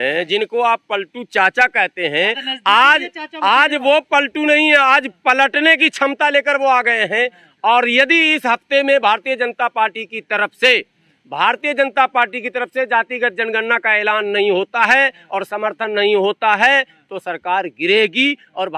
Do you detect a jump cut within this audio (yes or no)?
no